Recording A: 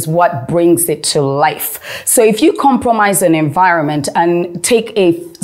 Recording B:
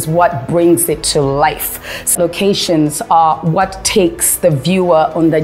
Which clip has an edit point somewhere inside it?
B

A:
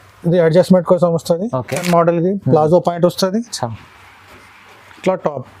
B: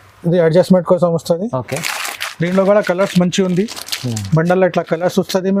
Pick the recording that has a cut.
A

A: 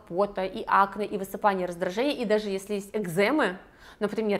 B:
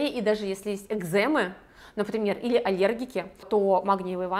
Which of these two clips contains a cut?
B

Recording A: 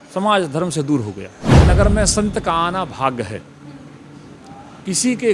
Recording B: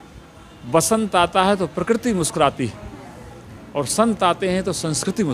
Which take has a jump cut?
A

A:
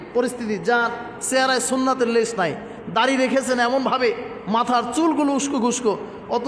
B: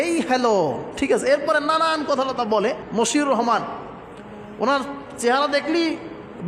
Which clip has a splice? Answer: B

